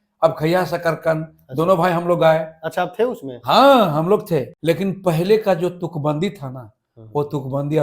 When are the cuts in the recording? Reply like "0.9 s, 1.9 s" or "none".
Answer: 4.5 s